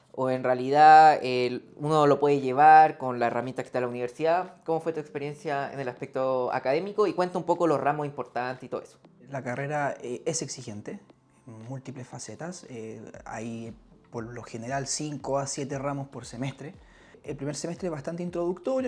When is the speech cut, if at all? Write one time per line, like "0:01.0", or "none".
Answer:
0:09.2
0:17.2